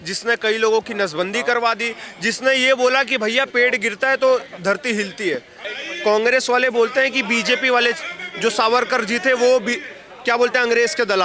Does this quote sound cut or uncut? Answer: cut